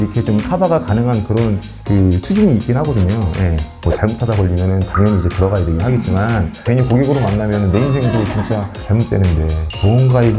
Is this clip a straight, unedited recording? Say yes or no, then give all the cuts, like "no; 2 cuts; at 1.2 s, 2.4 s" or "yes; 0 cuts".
no; 2 cuts; at 3.8 s, 6.6 s